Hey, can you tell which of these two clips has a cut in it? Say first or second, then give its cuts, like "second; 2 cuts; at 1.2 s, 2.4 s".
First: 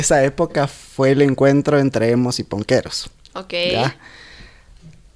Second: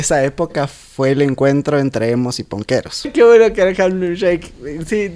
second; 1 cut; at 3.1 s